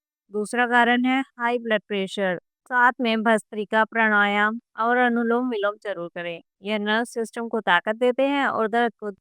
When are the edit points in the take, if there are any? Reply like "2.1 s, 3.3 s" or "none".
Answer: 2.5 s